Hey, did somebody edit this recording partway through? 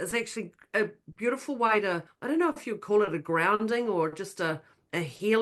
yes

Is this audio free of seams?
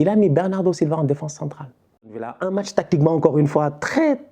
no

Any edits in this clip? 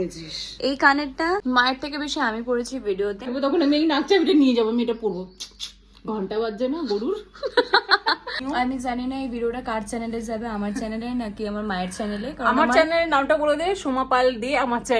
yes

